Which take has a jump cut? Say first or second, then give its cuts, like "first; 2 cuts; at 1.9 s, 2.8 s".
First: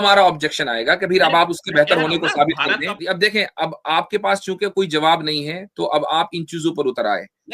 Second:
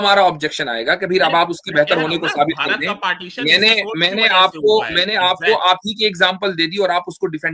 first; 1 cut; at 3.0 s